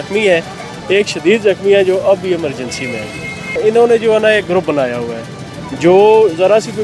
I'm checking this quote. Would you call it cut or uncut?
cut